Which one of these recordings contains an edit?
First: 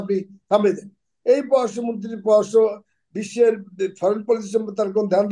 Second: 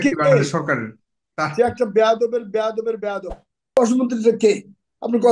second; 1 cut; at 3.8 s

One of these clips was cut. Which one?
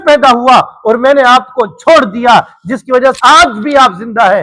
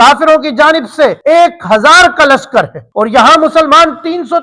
second; 1 cut; at 1.2 s

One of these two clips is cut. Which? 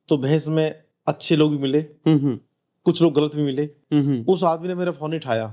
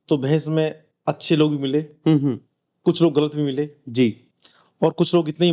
first; 1 cut; at 3.8 s

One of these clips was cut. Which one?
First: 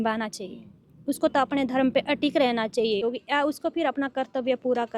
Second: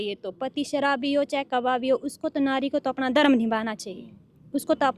first; 1 cut; at 3.0 s

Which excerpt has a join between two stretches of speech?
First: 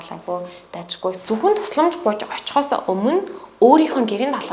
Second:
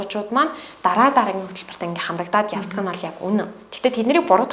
first; 1 cut; at 1.2 s

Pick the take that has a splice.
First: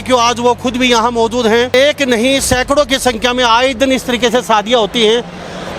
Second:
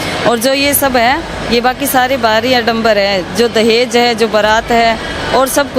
first; 1 cut; at 1.7 s

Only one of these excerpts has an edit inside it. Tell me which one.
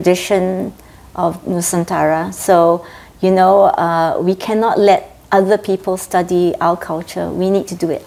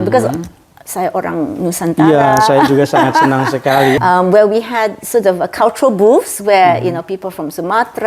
second; 1 cut; at 4.0 s

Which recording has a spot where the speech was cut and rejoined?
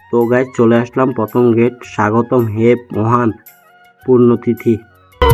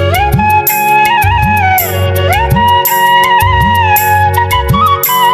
second; 1 cut; at 2.2 s

